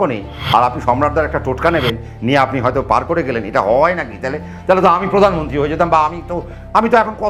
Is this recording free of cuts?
yes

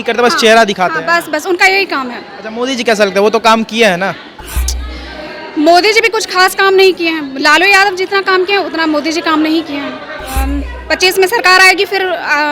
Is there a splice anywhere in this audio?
yes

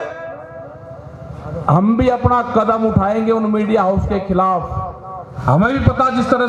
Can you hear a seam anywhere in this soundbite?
yes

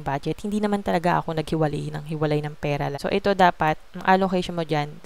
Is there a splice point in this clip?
yes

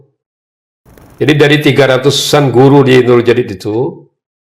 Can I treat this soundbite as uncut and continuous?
no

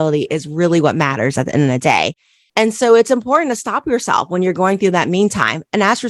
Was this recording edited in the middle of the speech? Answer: no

